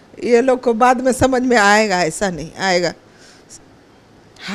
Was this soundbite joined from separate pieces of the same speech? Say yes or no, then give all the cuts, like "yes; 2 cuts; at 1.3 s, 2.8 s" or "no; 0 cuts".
no; 0 cuts